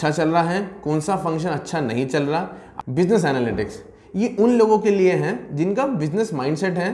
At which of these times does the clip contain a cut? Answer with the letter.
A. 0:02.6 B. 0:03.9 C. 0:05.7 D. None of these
A